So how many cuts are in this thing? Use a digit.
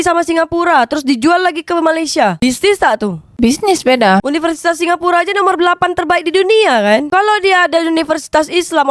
1